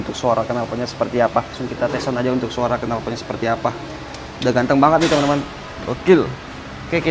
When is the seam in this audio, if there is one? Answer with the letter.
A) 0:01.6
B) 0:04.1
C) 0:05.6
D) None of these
A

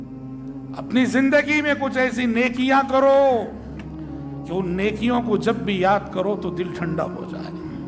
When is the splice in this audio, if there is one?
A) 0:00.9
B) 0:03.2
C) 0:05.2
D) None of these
A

